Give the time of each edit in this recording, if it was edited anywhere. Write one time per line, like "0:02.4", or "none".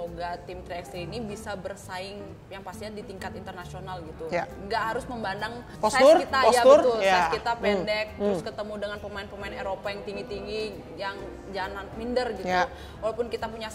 0:05.6